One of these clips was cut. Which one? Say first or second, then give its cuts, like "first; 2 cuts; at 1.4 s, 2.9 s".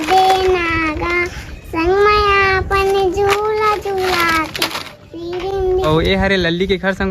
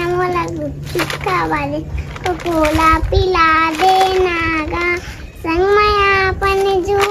first; 1 cut; at 5.9 s